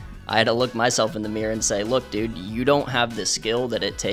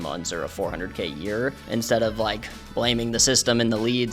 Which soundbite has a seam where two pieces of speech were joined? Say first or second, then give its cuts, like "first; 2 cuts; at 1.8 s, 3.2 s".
second; 1 cut; at 1.6 s